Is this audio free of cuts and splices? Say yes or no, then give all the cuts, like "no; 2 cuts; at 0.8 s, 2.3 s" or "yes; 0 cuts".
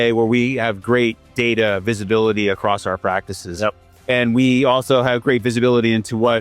yes; 0 cuts